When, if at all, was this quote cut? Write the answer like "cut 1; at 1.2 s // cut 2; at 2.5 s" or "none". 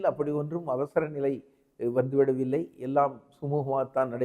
none